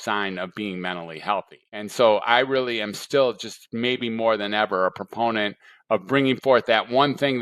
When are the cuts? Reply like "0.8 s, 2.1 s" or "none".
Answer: 1.9 s